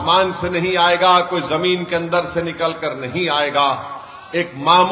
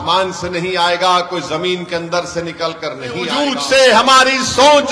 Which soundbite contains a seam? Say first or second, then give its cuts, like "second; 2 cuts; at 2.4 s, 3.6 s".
second; 1 cut; at 3.4 s